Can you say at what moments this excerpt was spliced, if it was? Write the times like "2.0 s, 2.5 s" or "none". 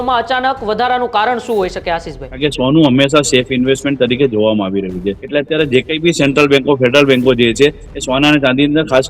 2.2 s, 5.2 s

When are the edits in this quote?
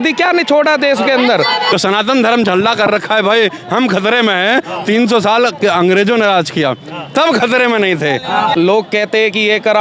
1.7 s, 8.5 s

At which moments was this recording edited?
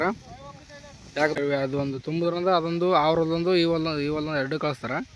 1.4 s

